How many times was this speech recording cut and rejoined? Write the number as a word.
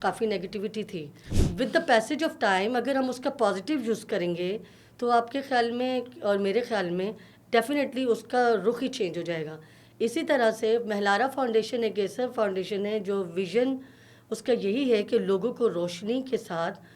one